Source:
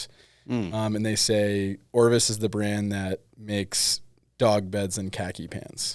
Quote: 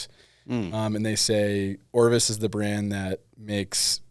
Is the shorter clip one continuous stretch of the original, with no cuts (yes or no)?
yes